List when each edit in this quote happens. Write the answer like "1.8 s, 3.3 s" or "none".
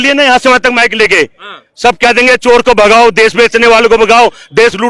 none